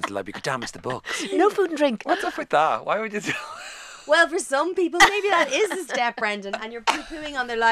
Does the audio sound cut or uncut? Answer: cut